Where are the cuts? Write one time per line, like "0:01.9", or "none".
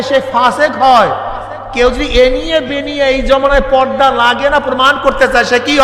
none